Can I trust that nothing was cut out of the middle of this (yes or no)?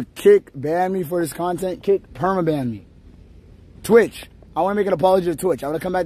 yes